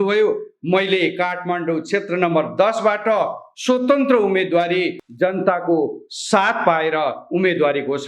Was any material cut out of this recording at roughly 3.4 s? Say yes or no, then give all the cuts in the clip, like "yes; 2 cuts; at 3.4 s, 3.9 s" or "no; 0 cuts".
no; 1 cut; at 5.0 s